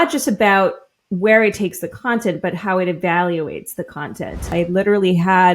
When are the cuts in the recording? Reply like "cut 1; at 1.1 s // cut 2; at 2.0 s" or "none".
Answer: cut 1; at 4.5 s